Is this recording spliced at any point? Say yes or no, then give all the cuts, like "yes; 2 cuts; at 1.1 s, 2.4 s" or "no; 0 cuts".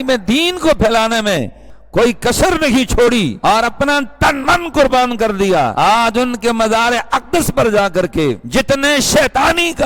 no; 0 cuts